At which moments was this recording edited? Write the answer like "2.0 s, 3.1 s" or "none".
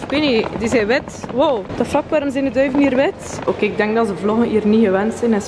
1.7 s